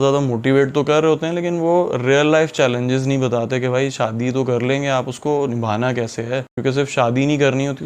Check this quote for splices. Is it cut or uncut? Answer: uncut